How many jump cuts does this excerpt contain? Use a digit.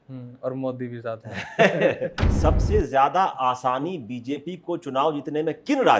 1